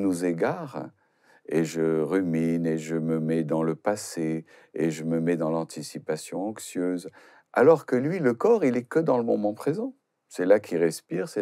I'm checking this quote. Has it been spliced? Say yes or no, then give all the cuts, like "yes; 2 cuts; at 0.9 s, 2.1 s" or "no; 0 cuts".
no; 0 cuts